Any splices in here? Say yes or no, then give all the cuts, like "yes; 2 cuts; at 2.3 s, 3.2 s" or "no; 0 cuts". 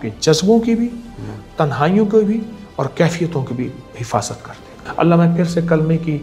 yes; 1 cut; at 4.8 s